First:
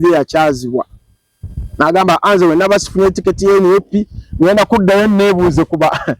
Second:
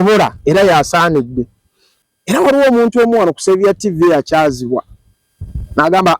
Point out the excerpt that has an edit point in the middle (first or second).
second